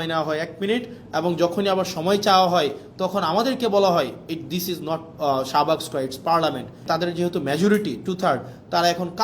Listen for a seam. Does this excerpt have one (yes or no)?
yes